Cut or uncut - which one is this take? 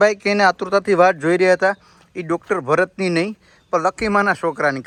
uncut